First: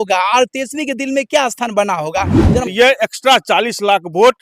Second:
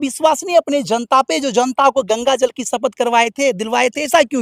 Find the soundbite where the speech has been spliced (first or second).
first